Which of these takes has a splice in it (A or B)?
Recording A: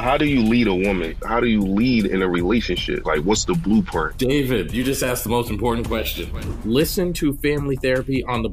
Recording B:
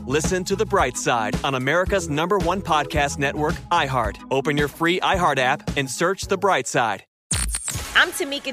B